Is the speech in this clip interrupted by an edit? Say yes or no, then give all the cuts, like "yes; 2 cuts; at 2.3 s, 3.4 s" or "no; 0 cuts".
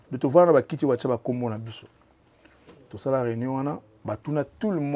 no; 0 cuts